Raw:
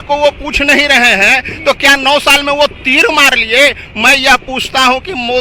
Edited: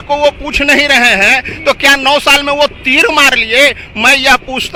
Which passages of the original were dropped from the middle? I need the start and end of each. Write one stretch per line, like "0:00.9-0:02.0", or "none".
none